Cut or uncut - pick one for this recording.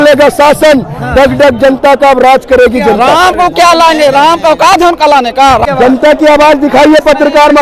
cut